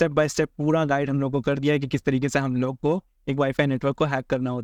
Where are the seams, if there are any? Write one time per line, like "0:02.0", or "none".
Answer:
none